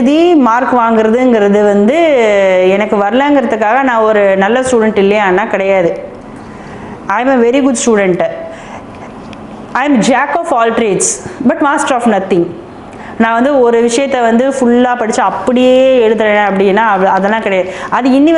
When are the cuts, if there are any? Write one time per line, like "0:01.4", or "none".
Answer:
none